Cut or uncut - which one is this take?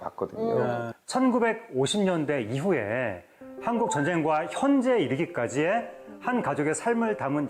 uncut